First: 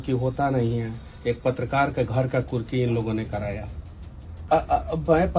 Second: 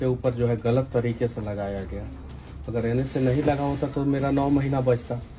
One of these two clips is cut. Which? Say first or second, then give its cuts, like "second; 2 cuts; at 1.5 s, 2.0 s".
first; 1 cut; at 4.4 s